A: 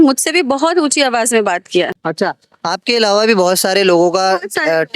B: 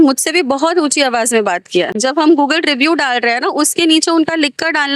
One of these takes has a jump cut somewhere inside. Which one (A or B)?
B